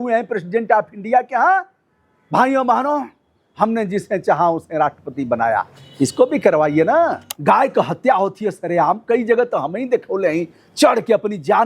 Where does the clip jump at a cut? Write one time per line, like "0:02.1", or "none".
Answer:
0:07.3